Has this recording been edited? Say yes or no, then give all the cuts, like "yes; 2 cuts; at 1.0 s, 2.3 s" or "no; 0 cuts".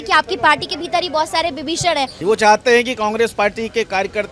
yes; 1 cut; at 2.1 s